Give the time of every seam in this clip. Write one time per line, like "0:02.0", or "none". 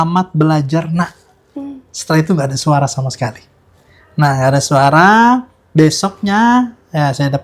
none